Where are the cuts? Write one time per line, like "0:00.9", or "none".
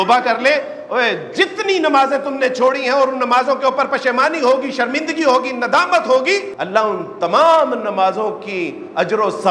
0:06.5